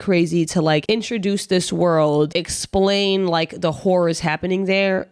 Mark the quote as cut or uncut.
cut